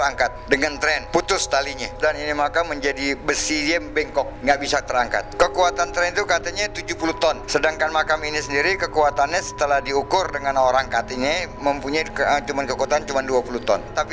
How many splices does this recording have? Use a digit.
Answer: 0